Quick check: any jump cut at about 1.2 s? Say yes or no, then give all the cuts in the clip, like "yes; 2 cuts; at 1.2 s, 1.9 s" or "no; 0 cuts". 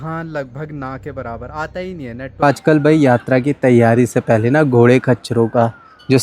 no; 1 cut; at 2.4 s